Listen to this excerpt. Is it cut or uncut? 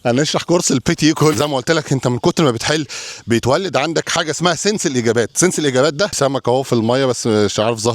cut